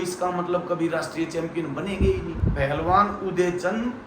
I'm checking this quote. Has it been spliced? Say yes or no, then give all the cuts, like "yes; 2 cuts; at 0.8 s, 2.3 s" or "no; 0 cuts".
yes; 1 cut; at 2.3 s